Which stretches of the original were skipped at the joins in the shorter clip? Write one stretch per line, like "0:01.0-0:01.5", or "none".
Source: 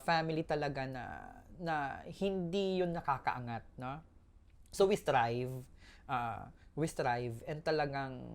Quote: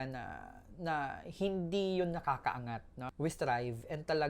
0:03.8-0:06.6